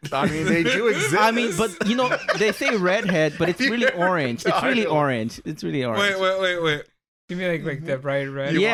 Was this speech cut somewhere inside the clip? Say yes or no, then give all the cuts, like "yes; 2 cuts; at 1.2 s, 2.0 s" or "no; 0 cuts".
no; 0 cuts